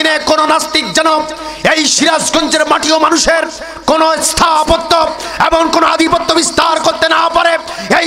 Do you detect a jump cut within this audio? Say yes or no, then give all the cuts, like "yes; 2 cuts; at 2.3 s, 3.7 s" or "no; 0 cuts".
no; 0 cuts